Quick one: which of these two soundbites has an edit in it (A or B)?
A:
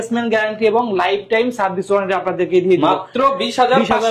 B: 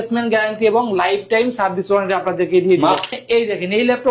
B